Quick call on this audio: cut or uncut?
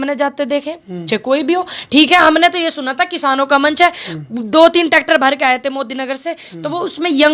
uncut